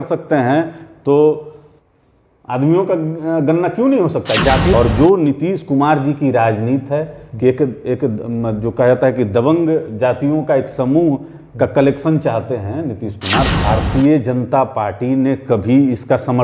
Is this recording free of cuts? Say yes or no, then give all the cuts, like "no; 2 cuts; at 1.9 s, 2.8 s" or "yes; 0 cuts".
no; 2 cuts; at 4.7 s, 13.5 s